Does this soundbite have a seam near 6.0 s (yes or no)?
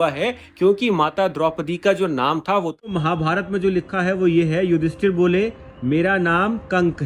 no